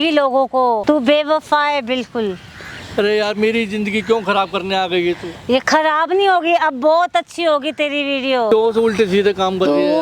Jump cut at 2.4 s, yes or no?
no